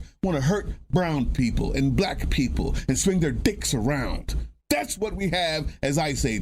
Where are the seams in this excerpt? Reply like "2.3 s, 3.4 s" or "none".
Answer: 4.5 s